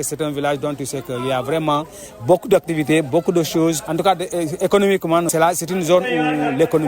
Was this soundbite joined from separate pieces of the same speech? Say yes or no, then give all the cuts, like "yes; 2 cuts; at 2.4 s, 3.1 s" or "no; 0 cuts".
yes; 2 cuts; at 3.8 s, 5.3 s